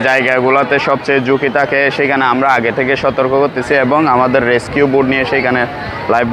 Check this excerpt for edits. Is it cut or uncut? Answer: uncut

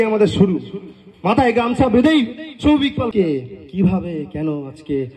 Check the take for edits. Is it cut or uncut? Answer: cut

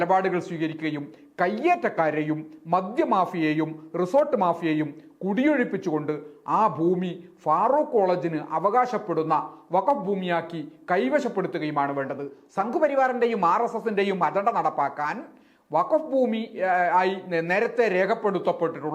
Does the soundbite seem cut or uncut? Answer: cut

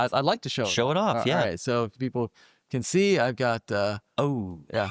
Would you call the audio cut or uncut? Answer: uncut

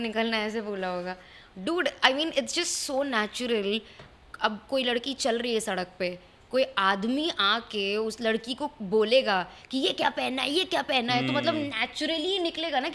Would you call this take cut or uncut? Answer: uncut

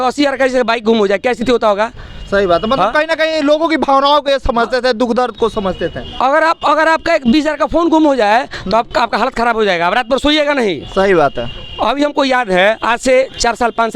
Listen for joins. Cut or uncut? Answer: uncut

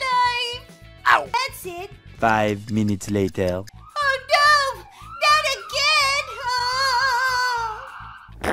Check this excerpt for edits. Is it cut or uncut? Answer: cut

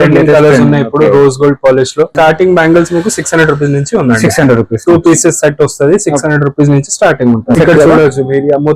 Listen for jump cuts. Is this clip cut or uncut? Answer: cut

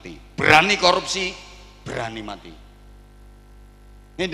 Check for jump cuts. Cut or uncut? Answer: uncut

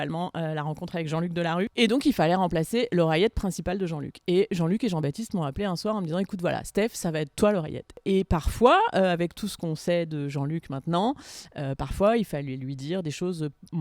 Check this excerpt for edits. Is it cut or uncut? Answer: cut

